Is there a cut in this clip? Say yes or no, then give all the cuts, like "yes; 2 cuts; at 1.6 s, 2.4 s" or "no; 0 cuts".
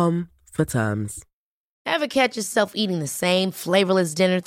yes; 1 cut; at 1.8 s